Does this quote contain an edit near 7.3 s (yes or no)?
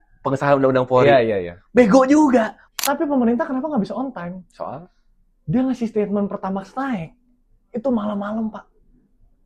no